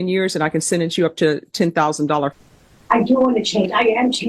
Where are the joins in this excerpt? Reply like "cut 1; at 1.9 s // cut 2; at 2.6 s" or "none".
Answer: cut 1; at 2.3 s